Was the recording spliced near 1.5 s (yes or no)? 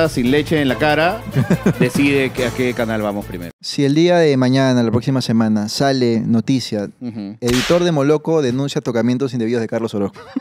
no